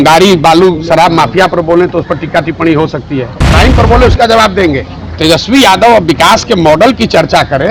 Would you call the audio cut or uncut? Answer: cut